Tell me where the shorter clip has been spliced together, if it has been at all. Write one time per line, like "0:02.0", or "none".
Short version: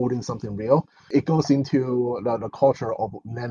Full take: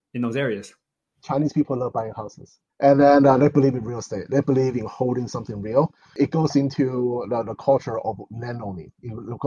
none